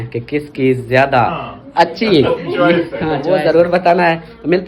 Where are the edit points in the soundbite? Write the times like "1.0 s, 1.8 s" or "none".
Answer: 3.2 s